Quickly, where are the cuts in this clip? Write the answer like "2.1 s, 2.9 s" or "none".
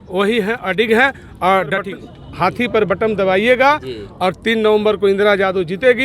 1.8 s